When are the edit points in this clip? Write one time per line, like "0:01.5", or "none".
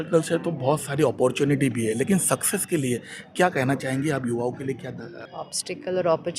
0:05.1